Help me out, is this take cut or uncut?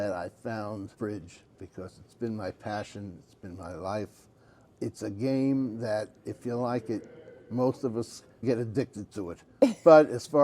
cut